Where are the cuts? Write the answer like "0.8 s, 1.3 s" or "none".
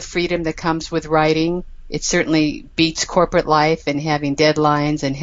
none